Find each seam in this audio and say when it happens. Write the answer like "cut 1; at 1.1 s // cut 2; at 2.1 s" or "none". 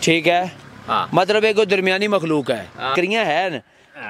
cut 1; at 2.9 s